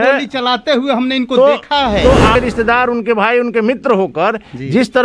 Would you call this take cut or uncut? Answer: cut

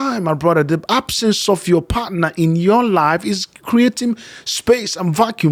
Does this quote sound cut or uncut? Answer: uncut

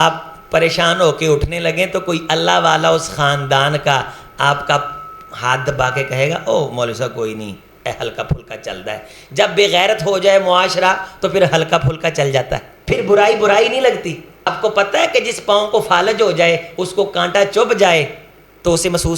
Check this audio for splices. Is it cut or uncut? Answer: cut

